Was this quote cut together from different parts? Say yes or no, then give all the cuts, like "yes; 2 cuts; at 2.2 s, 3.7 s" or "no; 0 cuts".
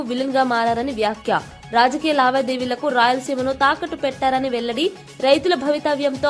no; 0 cuts